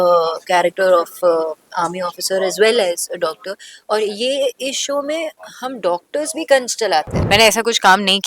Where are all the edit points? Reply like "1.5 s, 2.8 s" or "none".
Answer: 7.1 s